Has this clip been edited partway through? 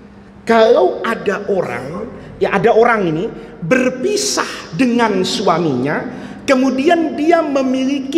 no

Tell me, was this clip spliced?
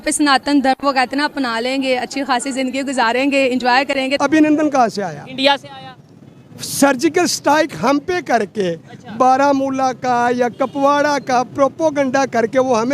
yes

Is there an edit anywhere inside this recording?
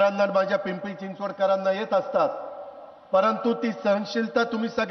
no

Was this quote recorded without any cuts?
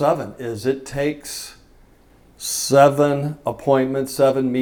yes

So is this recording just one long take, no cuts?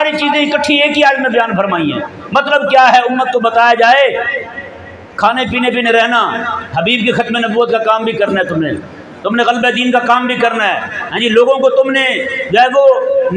yes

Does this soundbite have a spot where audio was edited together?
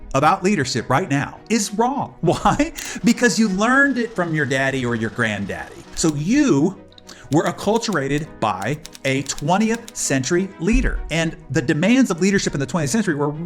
yes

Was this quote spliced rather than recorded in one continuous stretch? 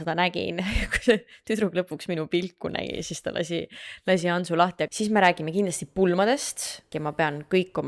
yes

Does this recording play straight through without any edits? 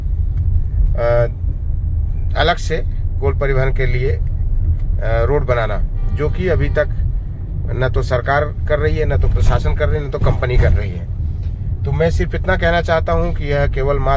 yes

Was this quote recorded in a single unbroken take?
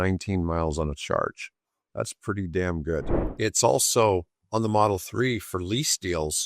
no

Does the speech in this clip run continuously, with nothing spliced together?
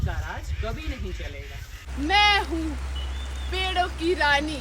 no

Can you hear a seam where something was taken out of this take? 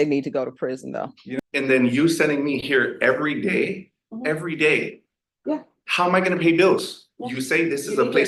yes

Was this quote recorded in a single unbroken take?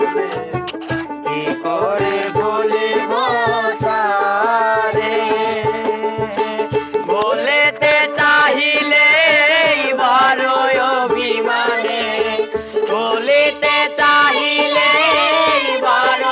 yes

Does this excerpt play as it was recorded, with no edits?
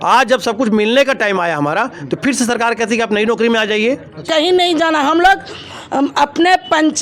no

